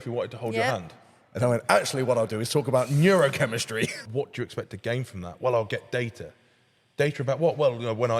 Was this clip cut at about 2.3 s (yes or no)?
no